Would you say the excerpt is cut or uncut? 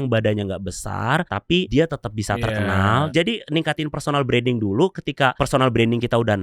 cut